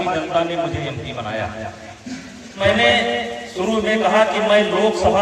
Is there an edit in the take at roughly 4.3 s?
no; 1 cut; at 2.6 s

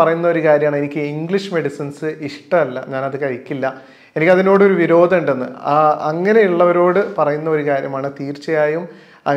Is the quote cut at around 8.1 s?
no; 0 cuts

